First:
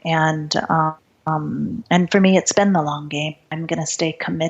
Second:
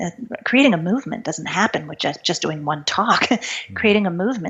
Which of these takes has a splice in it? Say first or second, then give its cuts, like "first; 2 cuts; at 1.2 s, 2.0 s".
first; 2 cuts; at 1.1 s, 3.4 s